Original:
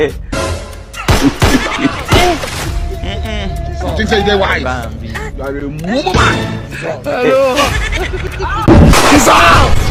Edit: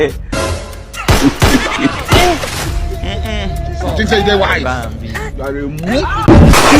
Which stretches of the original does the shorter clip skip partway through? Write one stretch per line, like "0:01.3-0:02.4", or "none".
0:05.8-0:08.2